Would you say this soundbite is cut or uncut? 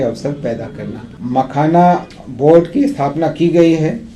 cut